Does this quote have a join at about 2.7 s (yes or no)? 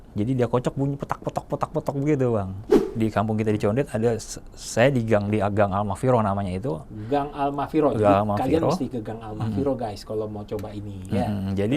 yes